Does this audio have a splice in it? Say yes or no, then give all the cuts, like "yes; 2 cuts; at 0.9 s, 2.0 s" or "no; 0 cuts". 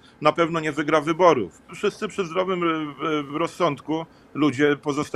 yes; 1 cut; at 1.7 s